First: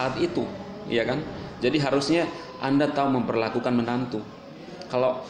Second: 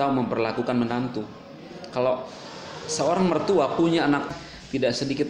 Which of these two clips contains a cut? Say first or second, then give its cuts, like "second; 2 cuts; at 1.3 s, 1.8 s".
second; 1 cut; at 4.3 s